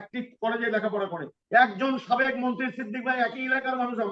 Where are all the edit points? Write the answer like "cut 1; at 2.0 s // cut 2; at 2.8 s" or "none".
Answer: cut 1; at 1.4 s